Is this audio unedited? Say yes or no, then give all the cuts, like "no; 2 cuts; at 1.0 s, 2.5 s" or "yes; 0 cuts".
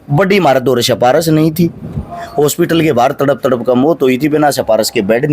yes; 0 cuts